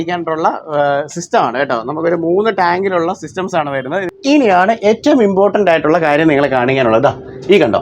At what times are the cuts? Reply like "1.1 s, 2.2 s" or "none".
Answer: 4.1 s